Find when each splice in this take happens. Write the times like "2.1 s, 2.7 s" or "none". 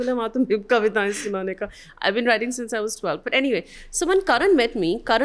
none